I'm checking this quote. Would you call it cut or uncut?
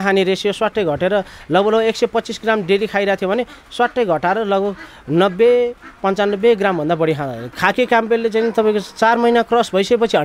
cut